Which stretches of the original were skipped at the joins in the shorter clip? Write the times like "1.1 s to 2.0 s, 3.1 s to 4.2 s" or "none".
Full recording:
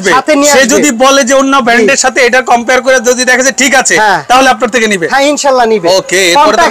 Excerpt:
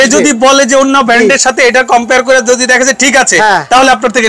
none